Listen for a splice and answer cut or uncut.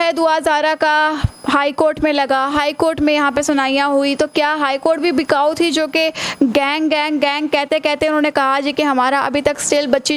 uncut